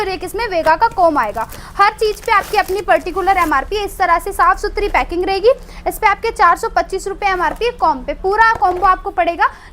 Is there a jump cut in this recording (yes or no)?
no